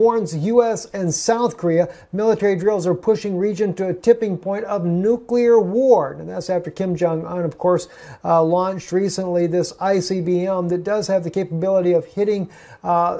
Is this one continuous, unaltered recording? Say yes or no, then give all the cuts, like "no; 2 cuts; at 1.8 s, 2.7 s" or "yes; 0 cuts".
yes; 0 cuts